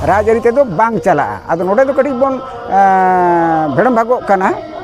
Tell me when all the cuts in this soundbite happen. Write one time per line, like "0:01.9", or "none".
none